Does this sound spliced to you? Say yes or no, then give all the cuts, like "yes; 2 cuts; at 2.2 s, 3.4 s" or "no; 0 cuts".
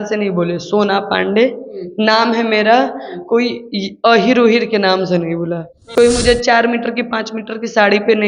yes; 1 cut; at 5.8 s